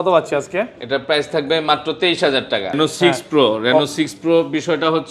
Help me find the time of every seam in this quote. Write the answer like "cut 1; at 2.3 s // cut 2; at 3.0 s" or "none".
cut 1; at 2.7 s